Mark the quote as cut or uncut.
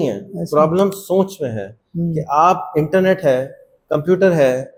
uncut